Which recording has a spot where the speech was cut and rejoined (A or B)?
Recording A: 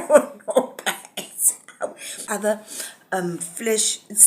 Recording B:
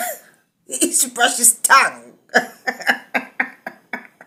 A